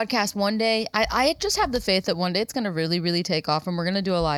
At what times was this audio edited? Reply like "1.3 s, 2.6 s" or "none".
none